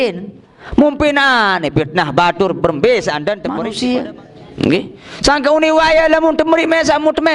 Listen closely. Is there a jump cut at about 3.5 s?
yes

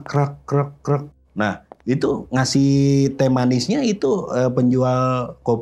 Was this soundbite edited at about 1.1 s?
yes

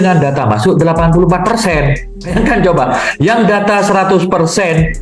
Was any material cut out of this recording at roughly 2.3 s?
yes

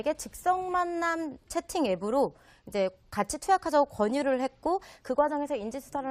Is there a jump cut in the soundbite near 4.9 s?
yes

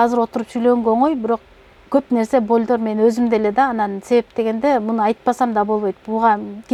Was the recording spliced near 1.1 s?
no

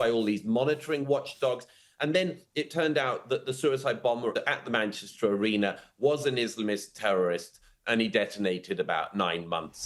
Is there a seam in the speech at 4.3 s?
yes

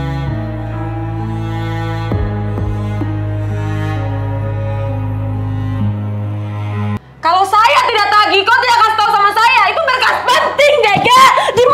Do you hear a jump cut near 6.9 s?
yes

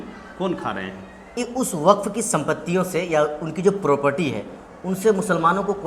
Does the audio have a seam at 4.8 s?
no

